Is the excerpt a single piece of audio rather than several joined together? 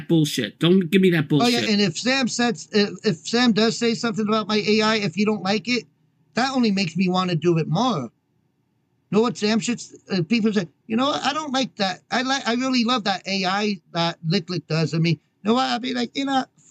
yes; 0 cuts

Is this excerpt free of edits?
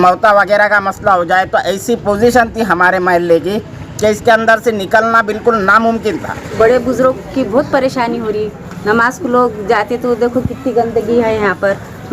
no; 1 cut; at 6.5 s

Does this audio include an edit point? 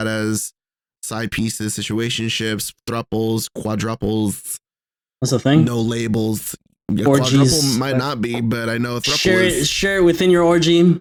no; 0 cuts

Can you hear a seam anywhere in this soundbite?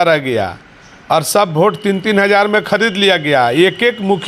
no; 0 cuts

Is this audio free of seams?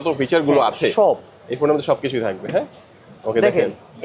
yes; 0 cuts

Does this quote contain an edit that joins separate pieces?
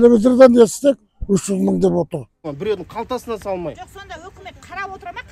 yes; 1 cut; at 2.4 s

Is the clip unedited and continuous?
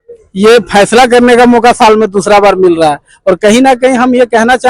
yes; 0 cuts

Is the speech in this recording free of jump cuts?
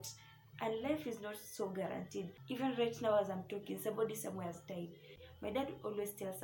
no; 2 cuts; at 2.4 s, 5.2 s

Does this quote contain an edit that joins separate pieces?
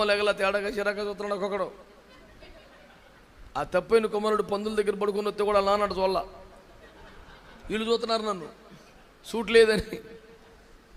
no; 0 cuts

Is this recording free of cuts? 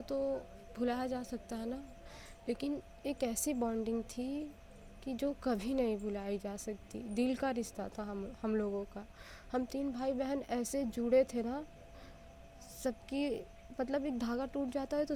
yes; 0 cuts

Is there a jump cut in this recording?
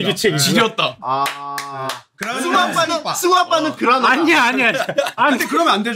yes; 3 cuts; at 1.0 s, 2.1 s, 5.2 s

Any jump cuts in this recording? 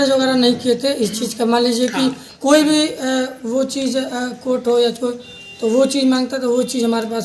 no; 0 cuts

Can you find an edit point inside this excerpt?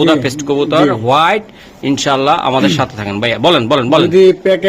no; 0 cuts

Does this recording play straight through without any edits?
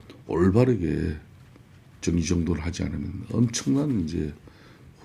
yes; 0 cuts

